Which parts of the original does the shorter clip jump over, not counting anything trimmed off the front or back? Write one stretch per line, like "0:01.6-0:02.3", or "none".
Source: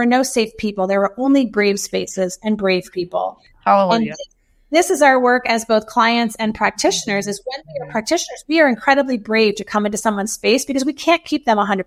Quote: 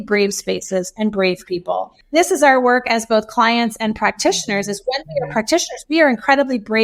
0:03.4-0:04.5